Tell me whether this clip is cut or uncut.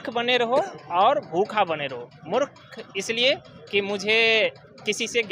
uncut